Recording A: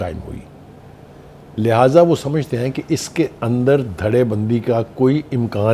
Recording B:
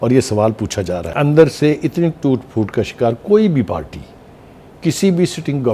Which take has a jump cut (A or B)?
B